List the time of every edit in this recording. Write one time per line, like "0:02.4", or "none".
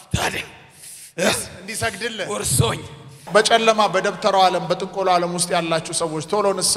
0:03.1

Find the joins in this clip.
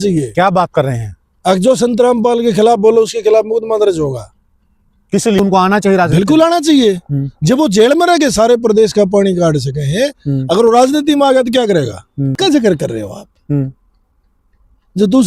0:05.4
0:12.3

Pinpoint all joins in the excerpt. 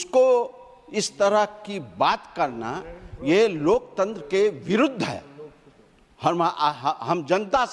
none

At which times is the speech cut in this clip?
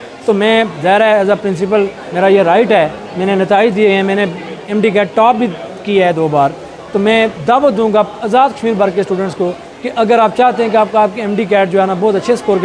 none

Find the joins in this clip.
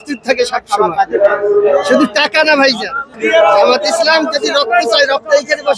0:03.1

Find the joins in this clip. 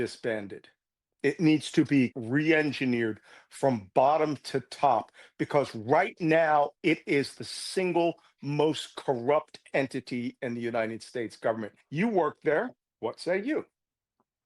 0:02.1
0:11.8

